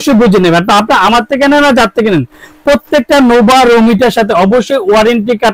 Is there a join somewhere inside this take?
no; 0 cuts

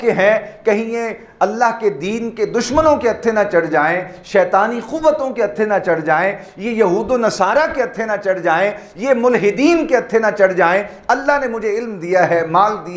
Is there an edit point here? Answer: no; 0 cuts

